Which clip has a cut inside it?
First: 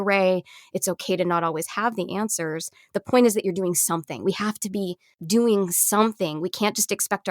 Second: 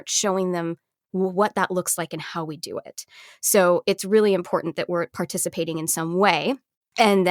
first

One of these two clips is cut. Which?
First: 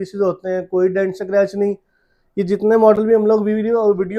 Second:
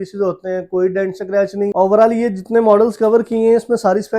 second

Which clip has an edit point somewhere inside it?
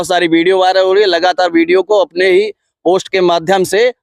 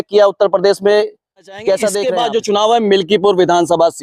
second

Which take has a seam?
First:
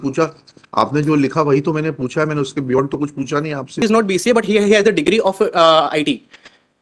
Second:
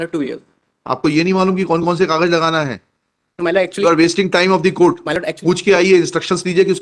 first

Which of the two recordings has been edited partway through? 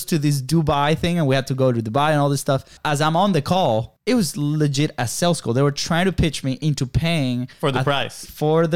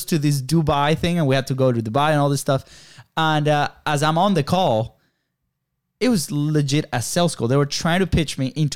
first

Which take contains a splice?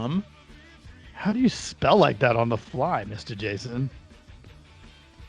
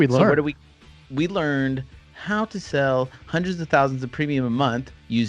first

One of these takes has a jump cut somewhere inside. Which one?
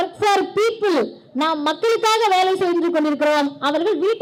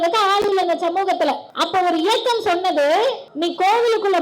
second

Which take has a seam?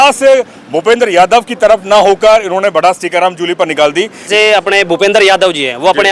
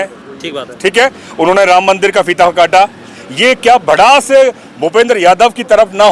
first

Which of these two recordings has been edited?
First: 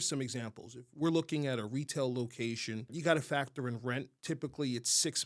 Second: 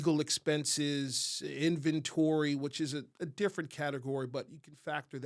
first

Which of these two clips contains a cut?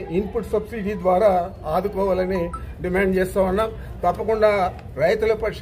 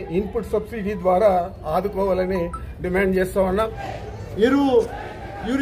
second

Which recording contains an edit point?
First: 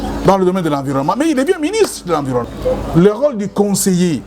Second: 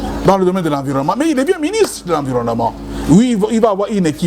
first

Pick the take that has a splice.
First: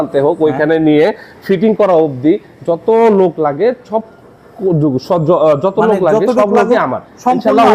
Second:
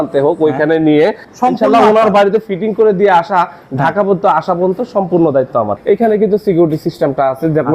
second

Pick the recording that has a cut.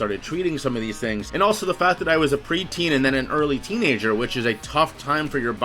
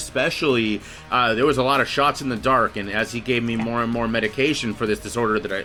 first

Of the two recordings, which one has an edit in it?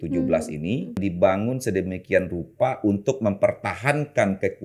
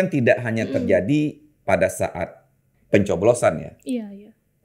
first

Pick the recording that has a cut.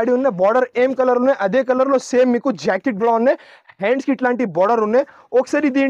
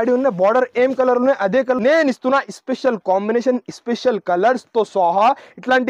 second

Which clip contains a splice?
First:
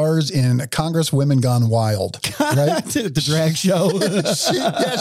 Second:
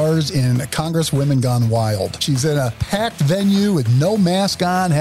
second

